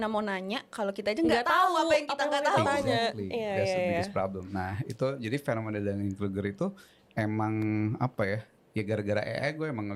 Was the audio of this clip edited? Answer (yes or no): no